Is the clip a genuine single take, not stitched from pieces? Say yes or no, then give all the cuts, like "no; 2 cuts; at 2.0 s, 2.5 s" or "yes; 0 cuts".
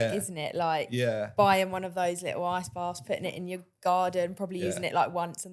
yes; 0 cuts